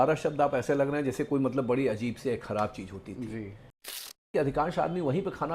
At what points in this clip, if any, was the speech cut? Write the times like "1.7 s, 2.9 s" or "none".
4.3 s